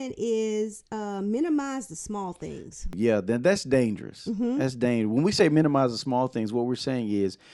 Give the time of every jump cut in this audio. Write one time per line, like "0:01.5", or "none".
0:02.9